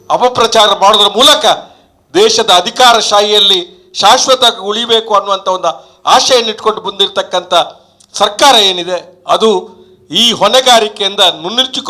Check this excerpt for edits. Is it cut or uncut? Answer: uncut